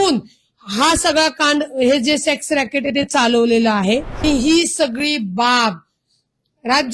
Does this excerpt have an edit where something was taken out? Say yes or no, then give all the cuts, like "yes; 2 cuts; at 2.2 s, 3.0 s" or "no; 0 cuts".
yes; 1 cut; at 4.2 s